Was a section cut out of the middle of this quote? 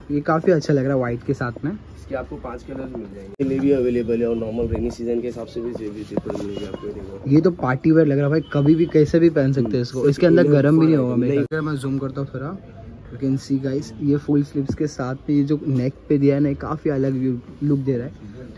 yes; 2 cuts; at 3.4 s, 11.5 s

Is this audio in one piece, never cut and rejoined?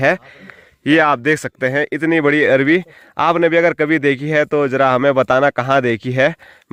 yes; 0 cuts

